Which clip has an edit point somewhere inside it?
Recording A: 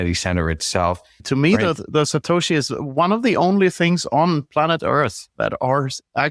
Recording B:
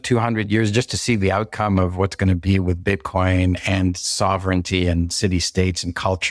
A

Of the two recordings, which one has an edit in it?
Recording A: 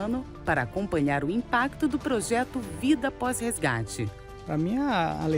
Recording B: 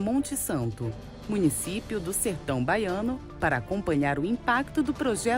A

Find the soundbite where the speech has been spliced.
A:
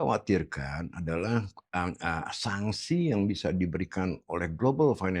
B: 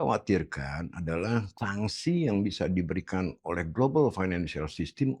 B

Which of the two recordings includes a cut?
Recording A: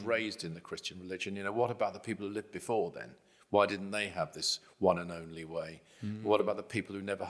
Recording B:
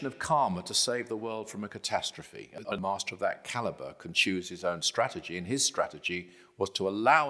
B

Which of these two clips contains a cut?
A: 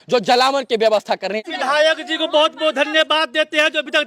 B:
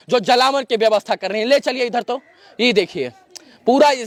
A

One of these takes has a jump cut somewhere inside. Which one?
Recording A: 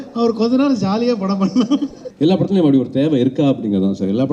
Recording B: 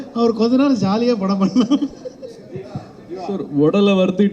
A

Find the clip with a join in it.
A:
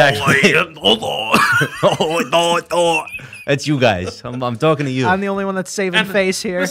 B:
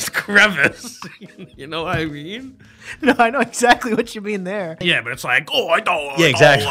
B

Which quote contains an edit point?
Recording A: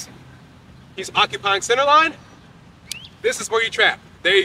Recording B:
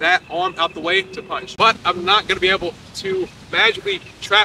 B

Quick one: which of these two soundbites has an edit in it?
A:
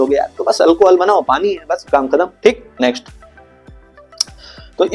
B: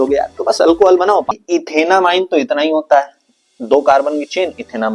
B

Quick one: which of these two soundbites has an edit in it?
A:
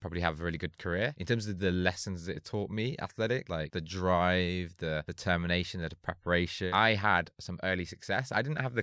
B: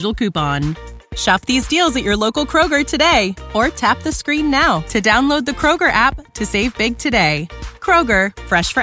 A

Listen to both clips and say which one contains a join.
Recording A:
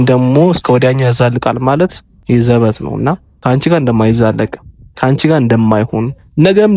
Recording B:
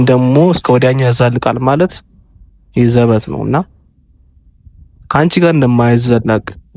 A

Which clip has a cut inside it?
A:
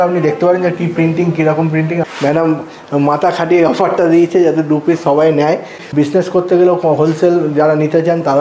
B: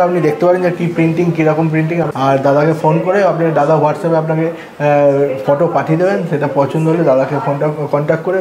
A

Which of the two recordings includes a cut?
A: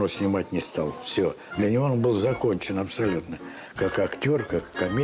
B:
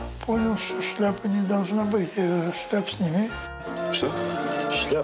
B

